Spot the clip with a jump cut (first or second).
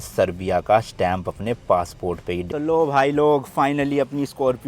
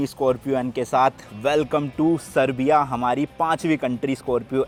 first